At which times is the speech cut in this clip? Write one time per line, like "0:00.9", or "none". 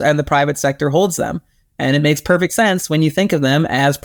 none